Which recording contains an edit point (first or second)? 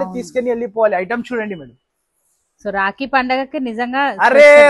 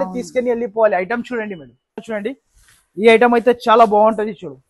second